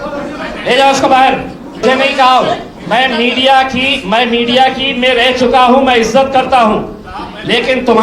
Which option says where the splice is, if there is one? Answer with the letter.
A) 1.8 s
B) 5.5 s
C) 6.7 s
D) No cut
A